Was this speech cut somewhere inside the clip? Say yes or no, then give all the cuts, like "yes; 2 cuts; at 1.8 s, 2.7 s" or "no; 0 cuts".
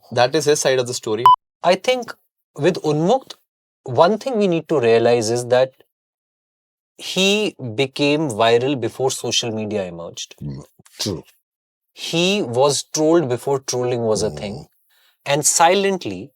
yes; 1 cut; at 1.3 s